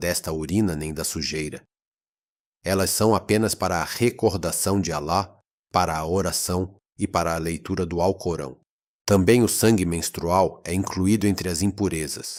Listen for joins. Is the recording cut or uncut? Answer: uncut